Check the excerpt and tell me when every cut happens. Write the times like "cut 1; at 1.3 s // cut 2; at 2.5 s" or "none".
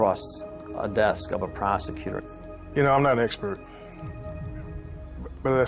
cut 1; at 3.6 s